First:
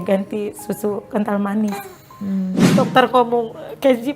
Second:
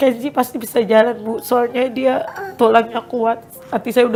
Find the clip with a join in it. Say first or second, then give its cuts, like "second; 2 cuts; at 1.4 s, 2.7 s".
first; 1 cut; at 2.7 s